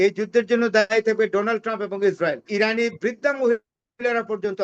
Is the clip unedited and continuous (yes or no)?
no